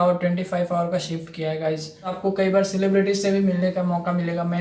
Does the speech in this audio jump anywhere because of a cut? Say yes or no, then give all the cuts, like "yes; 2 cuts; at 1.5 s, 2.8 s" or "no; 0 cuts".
yes; 1 cut; at 2.2 s